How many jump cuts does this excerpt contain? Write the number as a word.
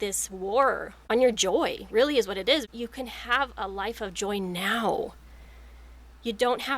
one